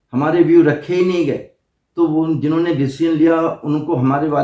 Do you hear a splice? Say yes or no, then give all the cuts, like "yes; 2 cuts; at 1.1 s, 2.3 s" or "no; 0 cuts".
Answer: no; 0 cuts